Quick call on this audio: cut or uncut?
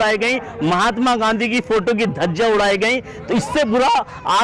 uncut